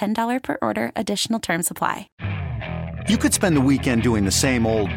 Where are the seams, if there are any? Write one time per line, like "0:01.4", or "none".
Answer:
0:02.1